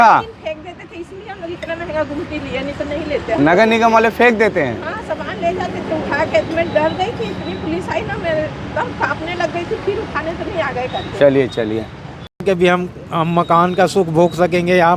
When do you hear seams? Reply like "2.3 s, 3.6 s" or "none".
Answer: 12.4 s